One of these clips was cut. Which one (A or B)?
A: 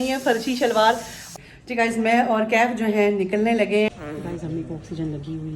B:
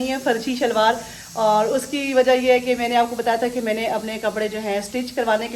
A